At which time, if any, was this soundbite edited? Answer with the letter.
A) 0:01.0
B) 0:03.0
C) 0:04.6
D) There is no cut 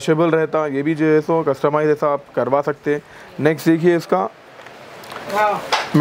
D